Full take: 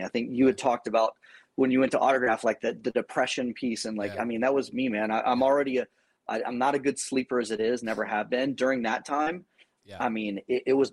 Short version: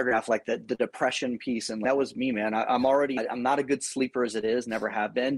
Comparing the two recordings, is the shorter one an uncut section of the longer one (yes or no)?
no